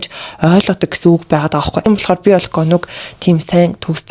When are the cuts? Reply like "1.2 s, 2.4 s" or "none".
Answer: 1.9 s